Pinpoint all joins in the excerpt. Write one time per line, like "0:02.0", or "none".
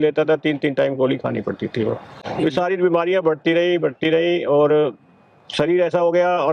none

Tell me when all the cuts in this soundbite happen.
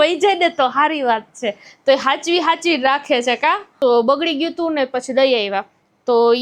0:03.7

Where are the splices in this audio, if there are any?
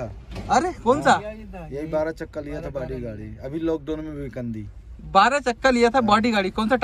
none

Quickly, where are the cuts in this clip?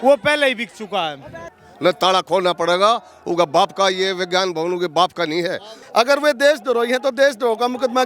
0:01.4
0:05.7

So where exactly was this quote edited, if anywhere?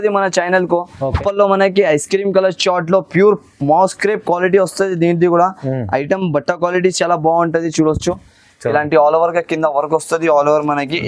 0:01.2

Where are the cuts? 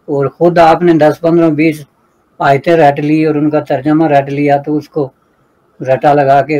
none

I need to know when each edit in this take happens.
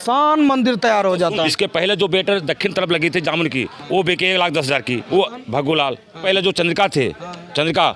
0:01.5
0:05.0
0:06.2

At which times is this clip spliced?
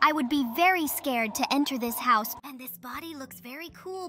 0:02.3

